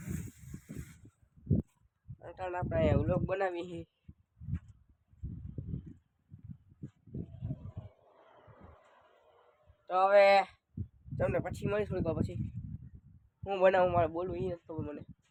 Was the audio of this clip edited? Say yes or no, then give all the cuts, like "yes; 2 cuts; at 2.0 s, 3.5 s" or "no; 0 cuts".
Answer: no; 0 cuts